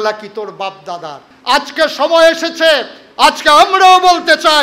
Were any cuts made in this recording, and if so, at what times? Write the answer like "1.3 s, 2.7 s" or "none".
1.3 s

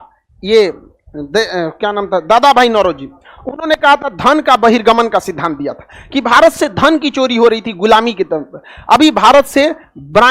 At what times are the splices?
none

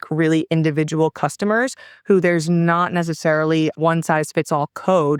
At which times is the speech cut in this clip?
none

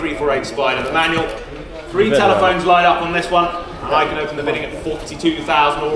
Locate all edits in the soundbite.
none

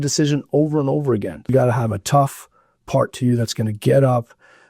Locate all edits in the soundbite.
1.4 s

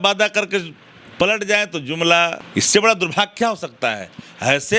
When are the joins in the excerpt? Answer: 2.4 s

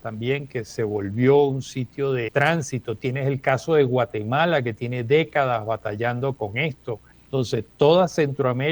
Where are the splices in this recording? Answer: 2.3 s, 7.1 s

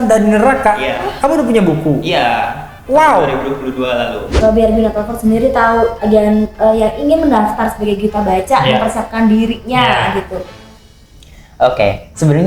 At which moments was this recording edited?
4.4 s

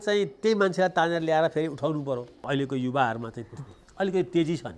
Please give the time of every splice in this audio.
2.4 s

